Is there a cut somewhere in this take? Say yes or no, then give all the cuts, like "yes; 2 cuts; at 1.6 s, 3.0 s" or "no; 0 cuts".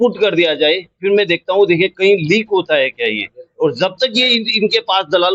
no; 0 cuts